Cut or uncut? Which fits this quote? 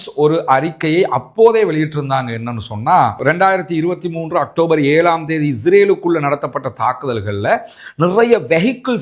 uncut